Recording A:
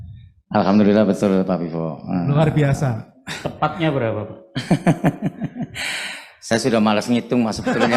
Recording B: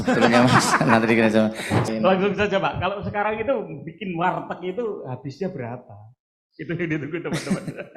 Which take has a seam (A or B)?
B